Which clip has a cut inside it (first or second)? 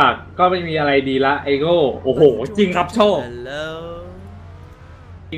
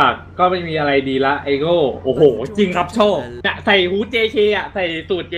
second